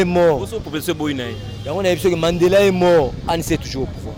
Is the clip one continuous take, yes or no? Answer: yes